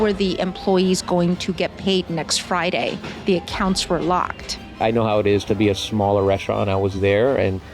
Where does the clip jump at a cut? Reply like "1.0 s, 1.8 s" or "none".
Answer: 4.8 s